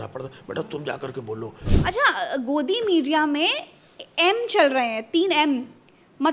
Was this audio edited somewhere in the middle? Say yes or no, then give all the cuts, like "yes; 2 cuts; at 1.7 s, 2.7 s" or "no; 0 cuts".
yes; 1 cut; at 1.6 s